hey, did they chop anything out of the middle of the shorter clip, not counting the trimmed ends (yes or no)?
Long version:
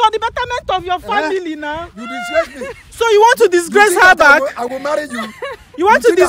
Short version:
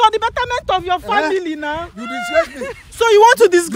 no